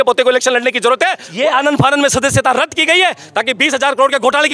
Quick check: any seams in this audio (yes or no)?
yes